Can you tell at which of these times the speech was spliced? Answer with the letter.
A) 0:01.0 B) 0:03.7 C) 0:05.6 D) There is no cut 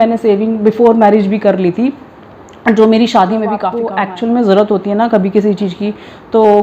B